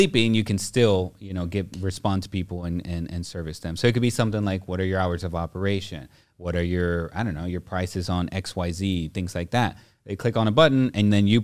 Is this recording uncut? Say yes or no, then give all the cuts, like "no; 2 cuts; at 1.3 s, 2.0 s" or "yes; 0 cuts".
yes; 0 cuts